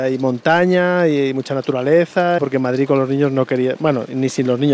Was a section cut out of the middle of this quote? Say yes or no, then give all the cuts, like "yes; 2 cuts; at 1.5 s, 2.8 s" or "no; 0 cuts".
yes; 1 cut; at 2.4 s